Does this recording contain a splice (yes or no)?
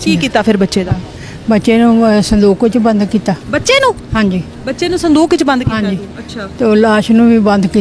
no